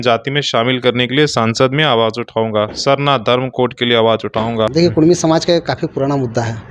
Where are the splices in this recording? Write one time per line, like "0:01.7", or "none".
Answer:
0:04.7